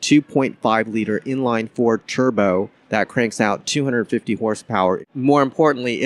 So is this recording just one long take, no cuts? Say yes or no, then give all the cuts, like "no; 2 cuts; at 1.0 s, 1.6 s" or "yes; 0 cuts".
no; 2 cuts; at 2.8 s, 5.1 s